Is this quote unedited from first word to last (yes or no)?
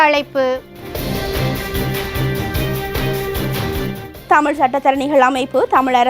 no